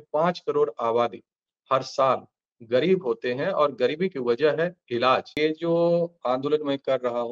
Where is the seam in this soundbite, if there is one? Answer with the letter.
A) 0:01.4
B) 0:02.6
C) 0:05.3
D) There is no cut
C